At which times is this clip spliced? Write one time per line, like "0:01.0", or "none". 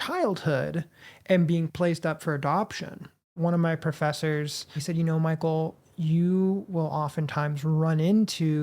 0:03.3
0:04.8